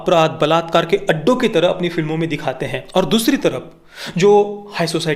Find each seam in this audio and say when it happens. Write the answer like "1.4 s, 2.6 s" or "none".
2.7 s